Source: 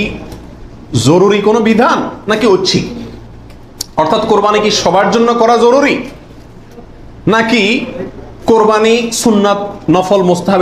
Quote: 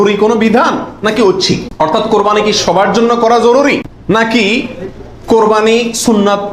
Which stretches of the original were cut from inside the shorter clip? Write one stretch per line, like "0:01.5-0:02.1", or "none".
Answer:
0:02.9-0:03.9
0:06.1-0:07.1